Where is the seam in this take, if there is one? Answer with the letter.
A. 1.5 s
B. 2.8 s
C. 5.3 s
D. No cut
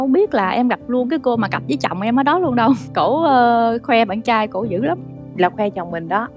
B